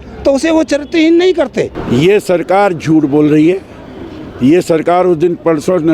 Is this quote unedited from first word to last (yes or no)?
no